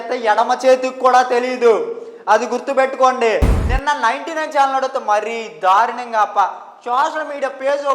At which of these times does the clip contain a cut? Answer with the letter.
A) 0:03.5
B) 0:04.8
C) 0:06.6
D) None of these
A